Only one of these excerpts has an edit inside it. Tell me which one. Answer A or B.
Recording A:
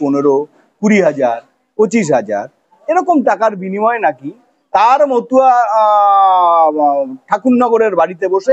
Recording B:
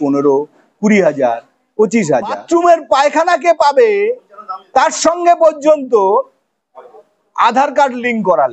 B